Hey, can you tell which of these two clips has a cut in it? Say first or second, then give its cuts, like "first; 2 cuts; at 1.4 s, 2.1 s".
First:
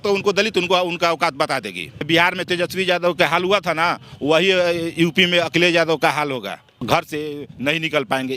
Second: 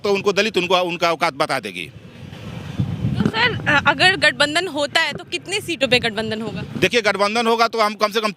first; 2 cuts; at 2.1 s, 6.8 s